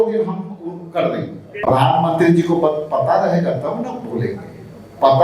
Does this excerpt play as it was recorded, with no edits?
no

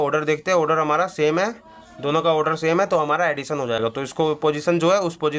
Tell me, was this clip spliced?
no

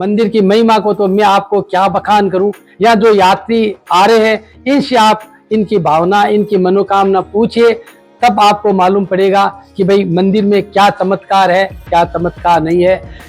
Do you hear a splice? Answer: no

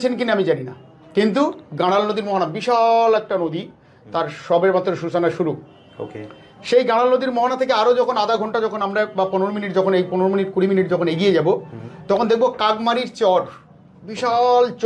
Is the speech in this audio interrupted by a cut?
no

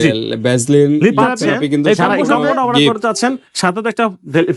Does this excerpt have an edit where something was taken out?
yes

